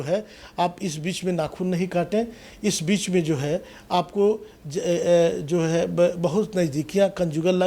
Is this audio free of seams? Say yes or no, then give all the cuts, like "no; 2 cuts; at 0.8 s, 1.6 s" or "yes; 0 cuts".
yes; 0 cuts